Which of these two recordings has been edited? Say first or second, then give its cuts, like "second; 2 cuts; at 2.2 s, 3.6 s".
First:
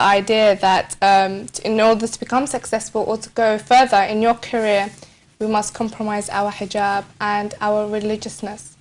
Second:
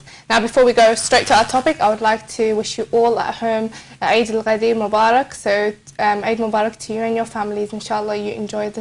second; 1 cut; at 3.2 s